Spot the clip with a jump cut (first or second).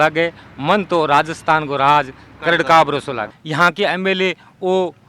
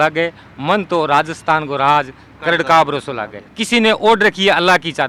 first